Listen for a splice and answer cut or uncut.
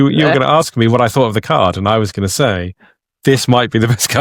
uncut